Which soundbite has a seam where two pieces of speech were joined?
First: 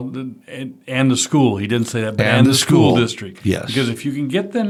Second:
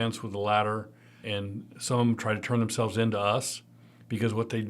second; 1 cut; at 1.2 s

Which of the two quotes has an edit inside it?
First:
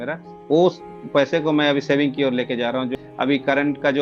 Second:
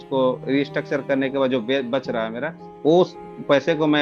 first; 1 cut; at 2.9 s

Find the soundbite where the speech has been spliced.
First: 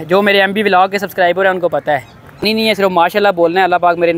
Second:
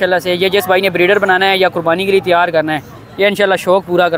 first; 1 cut; at 2.4 s

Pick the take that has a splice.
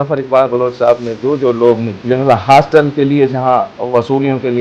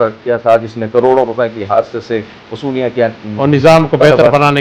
first; 2 cuts; at 2.0 s, 3.8 s

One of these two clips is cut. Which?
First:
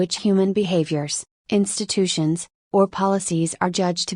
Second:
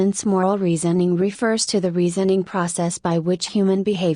second; 1 cut; at 1.0 s

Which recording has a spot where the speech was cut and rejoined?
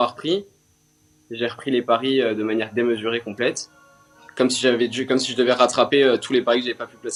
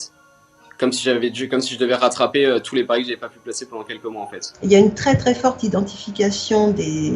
second; 1 cut; at 4.5 s

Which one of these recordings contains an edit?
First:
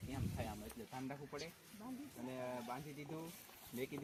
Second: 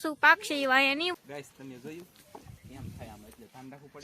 second; 1 cut; at 1.1 s

